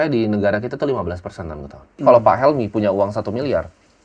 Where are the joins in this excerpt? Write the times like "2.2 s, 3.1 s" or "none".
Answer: 2.0 s

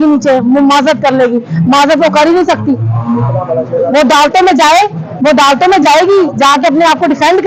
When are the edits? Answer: none

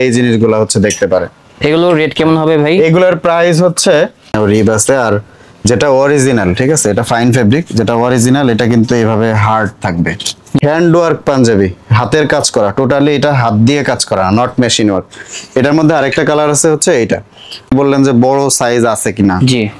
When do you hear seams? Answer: 4.4 s, 10.6 s, 17.7 s

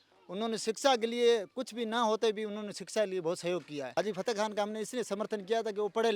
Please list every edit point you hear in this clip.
3.9 s

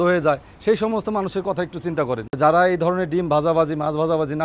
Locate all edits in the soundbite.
2.4 s

